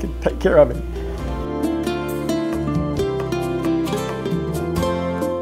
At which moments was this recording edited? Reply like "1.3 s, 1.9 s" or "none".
none